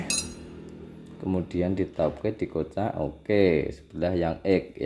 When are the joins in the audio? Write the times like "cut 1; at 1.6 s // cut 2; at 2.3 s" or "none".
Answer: none